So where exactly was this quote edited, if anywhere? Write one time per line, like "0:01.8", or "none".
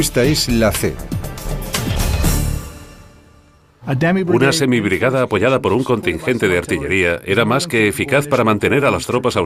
none